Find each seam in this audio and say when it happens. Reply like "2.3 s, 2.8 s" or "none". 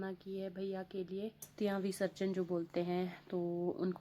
1.5 s